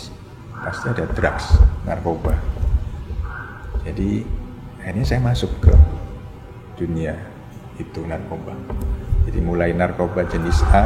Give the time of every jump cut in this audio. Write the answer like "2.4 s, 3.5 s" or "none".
none